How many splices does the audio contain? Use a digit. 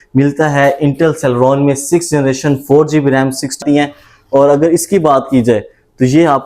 1